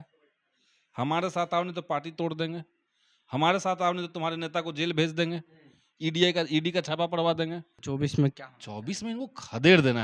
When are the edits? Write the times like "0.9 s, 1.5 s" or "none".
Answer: 7.7 s